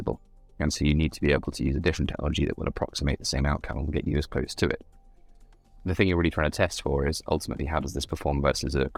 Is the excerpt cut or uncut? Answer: uncut